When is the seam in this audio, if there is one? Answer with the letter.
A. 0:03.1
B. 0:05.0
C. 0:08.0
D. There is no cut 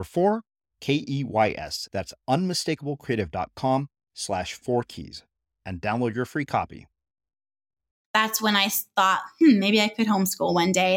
C